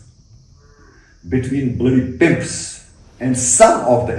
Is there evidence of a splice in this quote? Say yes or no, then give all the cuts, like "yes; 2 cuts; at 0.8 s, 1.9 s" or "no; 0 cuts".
no; 0 cuts